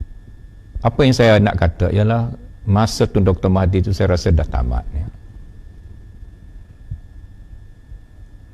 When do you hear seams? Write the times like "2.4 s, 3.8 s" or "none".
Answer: 1.7 s